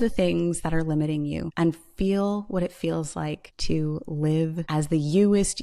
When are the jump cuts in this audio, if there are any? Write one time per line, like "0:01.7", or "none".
0:01.5
0:03.5
0:04.6